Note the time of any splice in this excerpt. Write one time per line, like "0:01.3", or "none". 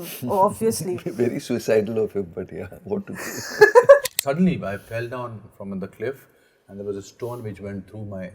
0:04.1